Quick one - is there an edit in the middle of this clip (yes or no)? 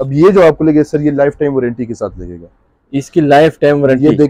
no